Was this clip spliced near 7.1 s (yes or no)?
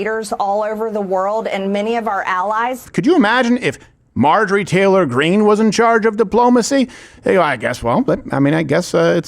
no